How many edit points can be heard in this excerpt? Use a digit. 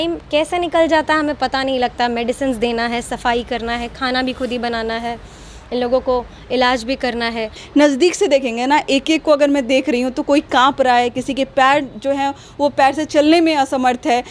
1